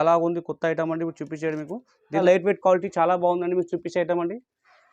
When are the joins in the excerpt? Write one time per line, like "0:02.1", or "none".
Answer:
0:02.2